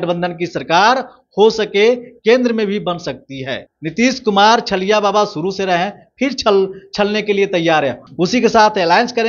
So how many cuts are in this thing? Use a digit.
2